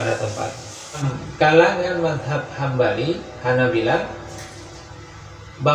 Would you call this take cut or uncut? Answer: cut